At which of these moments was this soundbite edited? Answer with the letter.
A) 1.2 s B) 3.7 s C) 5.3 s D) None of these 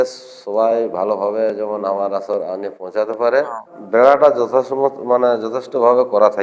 B